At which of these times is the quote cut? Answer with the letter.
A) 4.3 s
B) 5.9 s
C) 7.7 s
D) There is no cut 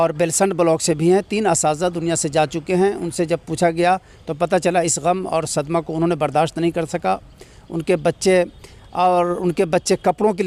D